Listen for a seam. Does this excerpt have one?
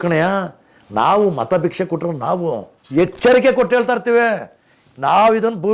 yes; 1 cut; at 2.7 s

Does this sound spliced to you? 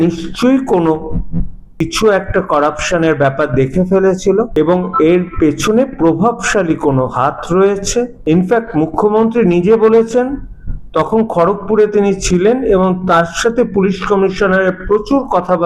yes; 3 cuts; at 1.8 s, 4.5 s, 8.2 s

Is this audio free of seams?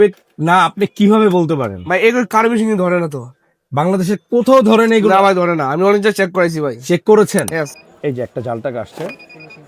no; 1 cut; at 7.7 s

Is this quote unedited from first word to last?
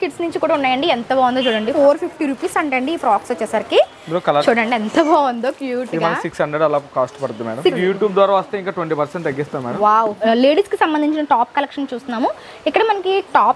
no; 4 cuts; at 1.7 s, 4.4 s, 7.8 s, 10.2 s

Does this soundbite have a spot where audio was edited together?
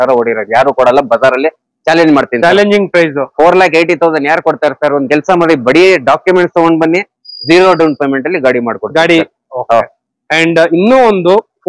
no; 0 cuts

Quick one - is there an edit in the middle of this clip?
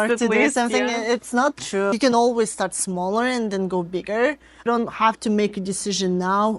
yes; 2 cuts; at 1.9 s, 4.7 s

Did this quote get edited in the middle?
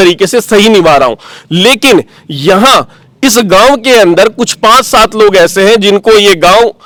no; 0 cuts

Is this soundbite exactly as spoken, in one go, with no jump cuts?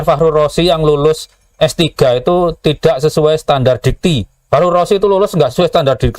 no; 1 cut; at 4.3 s

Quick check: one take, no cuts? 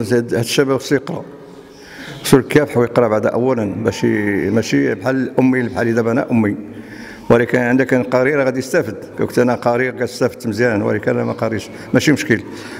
yes; 0 cuts

